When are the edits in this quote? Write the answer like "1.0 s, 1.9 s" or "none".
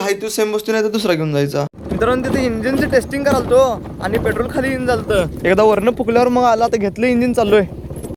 none